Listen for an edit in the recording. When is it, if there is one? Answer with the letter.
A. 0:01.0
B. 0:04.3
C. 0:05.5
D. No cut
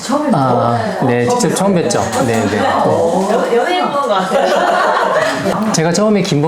C